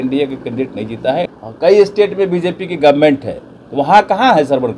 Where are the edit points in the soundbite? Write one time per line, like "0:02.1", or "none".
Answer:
0:01.3

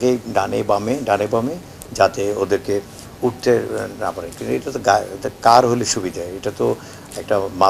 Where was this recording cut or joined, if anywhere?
none

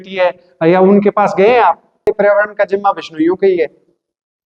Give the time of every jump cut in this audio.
0:02.1

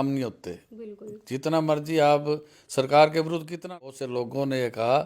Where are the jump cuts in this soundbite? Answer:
0:03.7

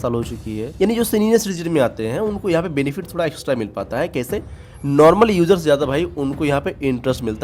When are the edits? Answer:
none

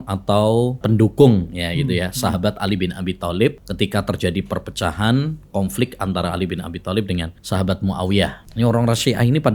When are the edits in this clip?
0:00.8
0:03.6
0:07.3
0:08.4

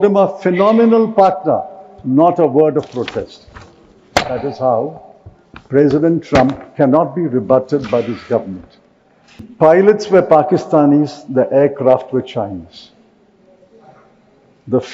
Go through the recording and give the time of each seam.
0:09.5

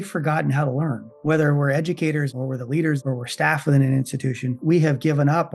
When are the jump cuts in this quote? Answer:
0:01.1
0:02.6
0:04.6

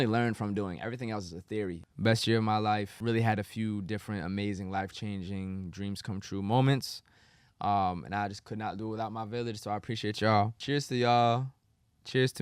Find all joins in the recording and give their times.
0:01.8
0:02.9
0:10.6

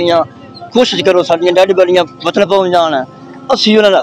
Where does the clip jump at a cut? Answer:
none

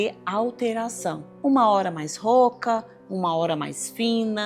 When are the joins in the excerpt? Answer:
0:01.3

